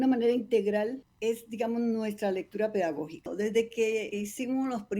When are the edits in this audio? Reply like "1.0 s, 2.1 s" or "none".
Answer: 1.1 s, 3.3 s, 4.1 s